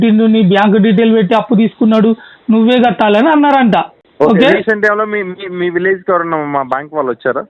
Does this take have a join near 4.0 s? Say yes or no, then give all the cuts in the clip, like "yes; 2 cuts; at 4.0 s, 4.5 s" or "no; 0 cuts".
yes; 1 cut; at 4.0 s